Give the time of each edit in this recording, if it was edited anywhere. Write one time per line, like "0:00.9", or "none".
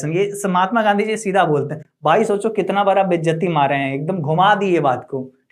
none